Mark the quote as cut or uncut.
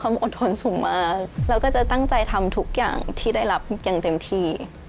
cut